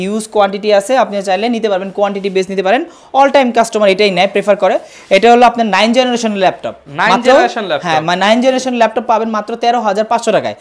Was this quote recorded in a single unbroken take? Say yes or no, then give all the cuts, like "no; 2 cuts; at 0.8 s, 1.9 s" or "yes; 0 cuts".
yes; 0 cuts